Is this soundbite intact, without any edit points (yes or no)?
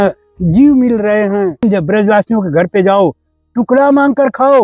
no